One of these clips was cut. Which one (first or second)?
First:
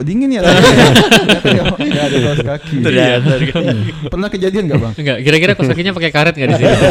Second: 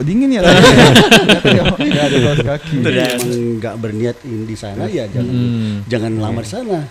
second